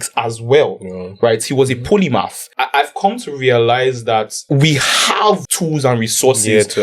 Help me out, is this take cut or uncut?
cut